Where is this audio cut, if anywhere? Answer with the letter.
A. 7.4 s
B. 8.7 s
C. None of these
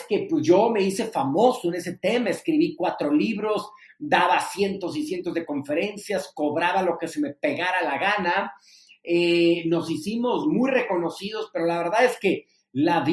C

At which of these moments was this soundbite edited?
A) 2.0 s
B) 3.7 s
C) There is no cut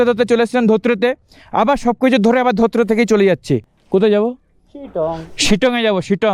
B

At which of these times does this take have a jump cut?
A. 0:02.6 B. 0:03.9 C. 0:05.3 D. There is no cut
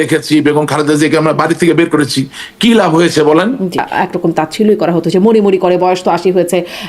B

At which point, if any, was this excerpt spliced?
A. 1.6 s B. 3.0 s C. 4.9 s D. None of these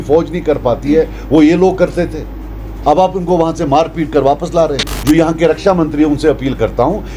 C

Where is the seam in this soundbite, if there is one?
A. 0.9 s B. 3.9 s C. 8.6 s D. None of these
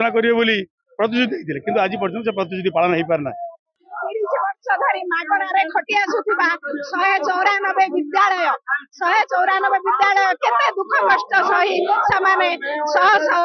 B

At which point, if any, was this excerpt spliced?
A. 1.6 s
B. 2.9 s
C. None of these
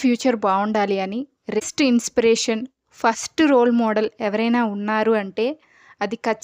A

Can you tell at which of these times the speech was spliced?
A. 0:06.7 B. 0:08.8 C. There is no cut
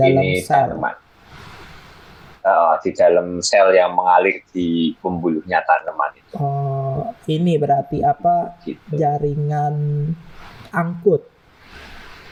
C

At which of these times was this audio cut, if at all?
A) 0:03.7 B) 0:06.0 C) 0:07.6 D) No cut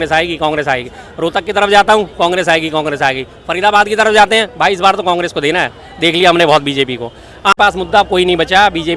C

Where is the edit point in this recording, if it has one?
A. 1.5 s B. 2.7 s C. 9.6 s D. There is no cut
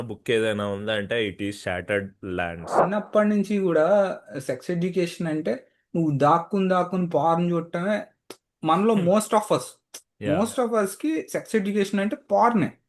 B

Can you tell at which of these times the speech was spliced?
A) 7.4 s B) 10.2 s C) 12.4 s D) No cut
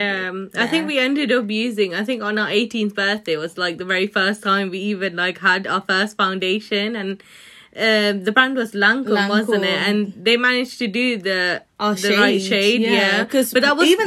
D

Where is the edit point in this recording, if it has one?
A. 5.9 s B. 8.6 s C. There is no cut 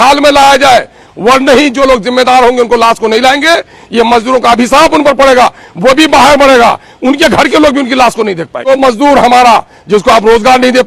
B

